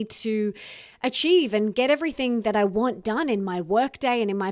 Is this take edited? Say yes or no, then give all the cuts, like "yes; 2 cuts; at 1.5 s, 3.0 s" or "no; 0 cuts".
no; 0 cuts